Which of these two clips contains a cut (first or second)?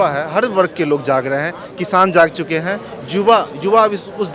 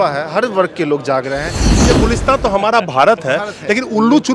second